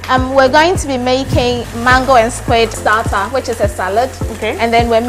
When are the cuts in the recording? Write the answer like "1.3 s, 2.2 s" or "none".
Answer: 1.7 s